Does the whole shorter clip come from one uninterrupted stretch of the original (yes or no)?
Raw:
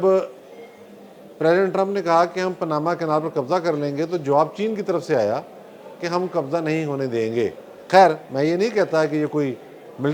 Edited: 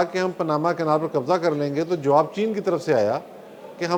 yes